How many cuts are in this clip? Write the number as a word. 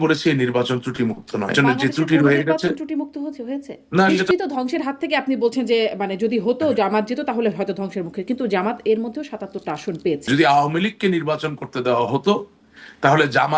three